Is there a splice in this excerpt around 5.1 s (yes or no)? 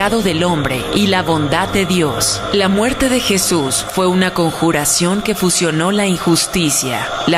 no